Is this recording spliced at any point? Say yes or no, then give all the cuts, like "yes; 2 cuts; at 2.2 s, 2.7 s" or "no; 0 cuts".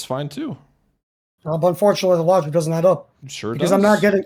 no; 0 cuts